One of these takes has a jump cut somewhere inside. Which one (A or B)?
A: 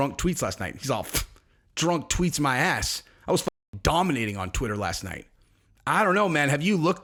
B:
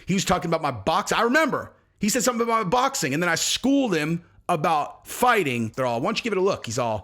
B